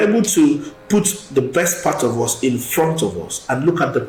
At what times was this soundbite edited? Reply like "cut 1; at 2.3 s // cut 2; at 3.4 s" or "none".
none